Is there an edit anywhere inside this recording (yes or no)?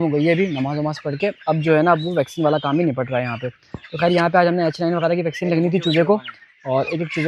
no